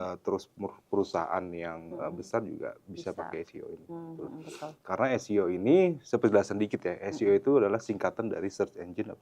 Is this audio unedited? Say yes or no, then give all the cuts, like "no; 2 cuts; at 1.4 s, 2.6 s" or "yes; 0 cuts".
yes; 0 cuts